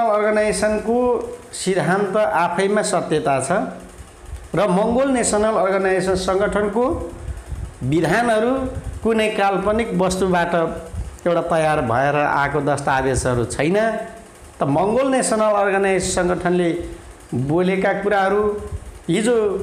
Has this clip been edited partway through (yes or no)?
no